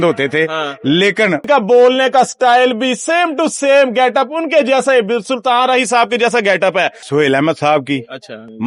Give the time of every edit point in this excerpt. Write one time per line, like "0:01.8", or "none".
0:01.4
0:07.0